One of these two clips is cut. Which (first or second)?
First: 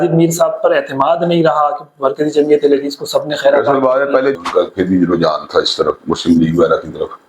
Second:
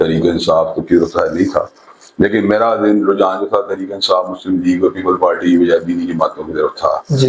first